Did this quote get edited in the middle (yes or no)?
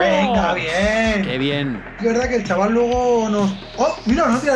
yes